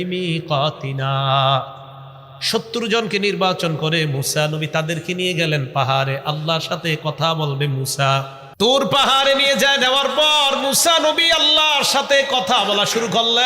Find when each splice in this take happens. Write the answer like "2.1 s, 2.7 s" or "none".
8.4 s